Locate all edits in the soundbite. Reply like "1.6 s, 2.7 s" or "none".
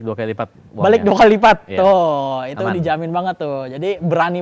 none